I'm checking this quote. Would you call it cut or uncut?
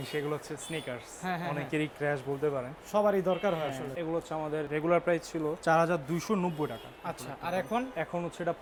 uncut